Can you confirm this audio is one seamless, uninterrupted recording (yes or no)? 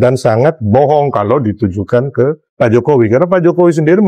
no